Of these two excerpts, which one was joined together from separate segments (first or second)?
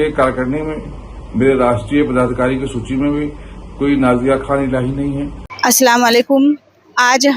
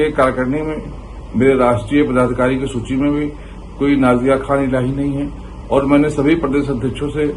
first